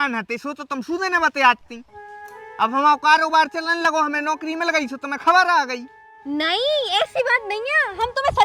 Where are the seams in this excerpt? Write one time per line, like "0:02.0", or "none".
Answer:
none